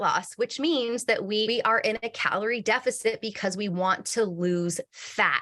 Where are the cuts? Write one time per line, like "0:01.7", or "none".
0:01.5